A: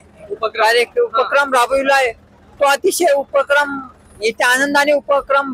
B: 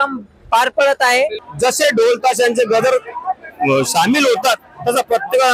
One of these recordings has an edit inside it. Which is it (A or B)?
B